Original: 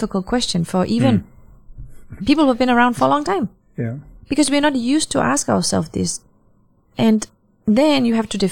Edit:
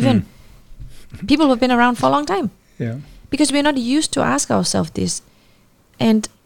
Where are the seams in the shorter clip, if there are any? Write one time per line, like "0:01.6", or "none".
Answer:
none